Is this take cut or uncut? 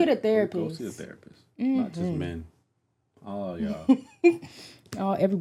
uncut